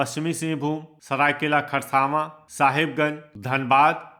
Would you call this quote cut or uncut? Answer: uncut